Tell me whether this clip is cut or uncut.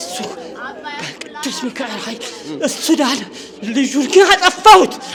uncut